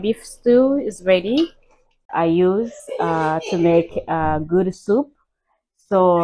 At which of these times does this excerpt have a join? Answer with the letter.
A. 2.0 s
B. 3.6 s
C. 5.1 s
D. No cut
A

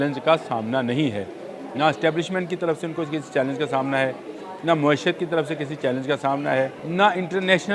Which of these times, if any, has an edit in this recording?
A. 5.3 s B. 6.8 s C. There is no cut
B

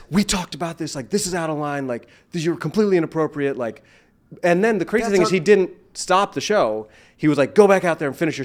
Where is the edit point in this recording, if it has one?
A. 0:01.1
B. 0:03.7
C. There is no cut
C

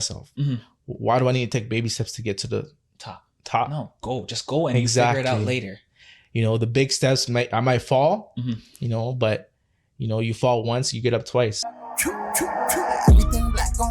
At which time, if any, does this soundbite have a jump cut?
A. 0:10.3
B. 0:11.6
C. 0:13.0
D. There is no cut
B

